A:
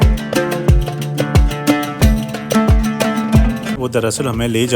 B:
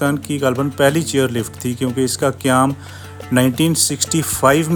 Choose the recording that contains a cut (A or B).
A